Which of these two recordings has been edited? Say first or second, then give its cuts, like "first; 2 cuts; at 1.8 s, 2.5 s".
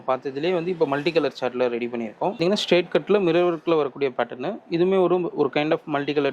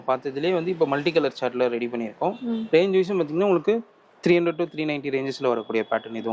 first; 1 cut; at 2.4 s